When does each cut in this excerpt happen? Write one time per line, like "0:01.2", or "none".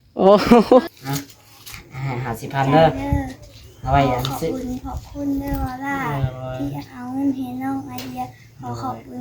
0:00.9